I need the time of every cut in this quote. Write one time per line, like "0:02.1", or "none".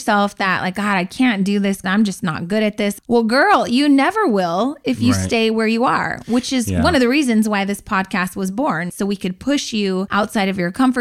0:01.8
0:03.0
0:08.9
0:10.1